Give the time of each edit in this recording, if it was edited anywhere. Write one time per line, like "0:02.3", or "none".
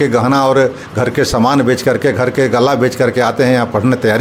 none